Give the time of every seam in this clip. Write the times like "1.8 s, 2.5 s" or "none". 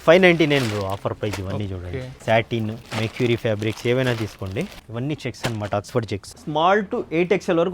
2.1 s, 2.8 s, 4.8 s, 6.3 s